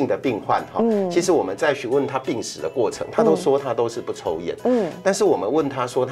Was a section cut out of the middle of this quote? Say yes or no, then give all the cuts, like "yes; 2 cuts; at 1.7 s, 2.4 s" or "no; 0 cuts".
no; 0 cuts